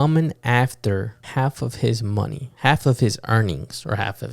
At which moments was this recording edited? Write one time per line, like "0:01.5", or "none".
0:01.2